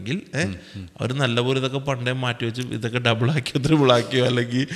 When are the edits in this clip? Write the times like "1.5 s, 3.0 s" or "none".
none